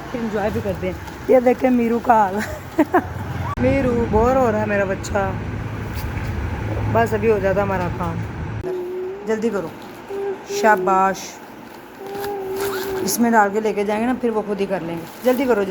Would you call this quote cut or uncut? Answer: cut